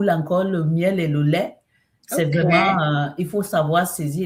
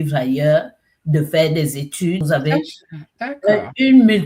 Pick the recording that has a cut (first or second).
second